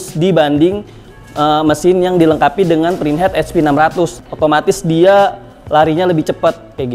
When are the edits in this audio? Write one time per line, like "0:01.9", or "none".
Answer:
0:04.2